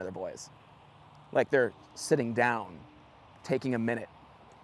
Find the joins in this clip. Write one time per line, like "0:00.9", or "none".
none